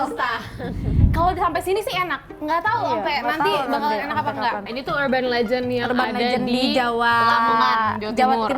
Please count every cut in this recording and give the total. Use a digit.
2